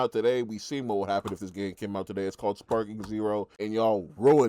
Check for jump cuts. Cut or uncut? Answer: cut